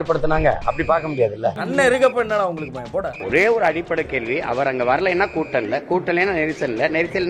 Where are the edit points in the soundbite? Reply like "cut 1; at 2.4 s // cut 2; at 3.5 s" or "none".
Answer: cut 1; at 1.5 s // cut 2; at 3.2 s